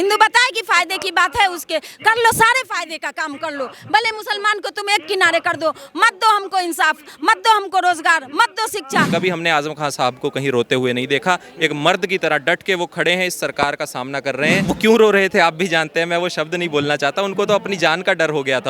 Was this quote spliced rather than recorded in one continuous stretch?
yes; 2 cuts; at 9.1 s, 14.6 s

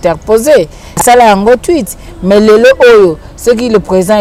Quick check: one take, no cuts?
yes; 0 cuts

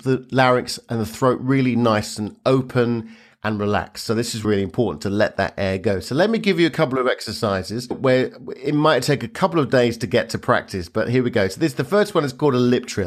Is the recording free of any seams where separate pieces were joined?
yes; 0 cuts

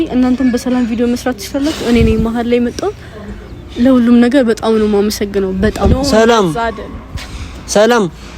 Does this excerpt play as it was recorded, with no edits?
no; 1 cut; at 5.9 s

